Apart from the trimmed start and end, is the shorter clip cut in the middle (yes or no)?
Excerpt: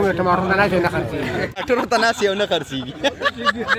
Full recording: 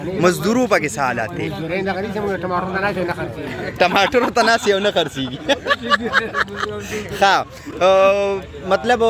yes